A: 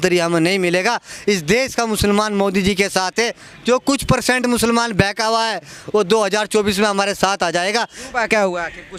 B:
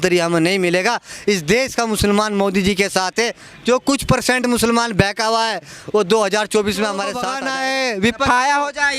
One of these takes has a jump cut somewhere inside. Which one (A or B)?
B